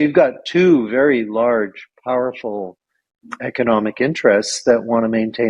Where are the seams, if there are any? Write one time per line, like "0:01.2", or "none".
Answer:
none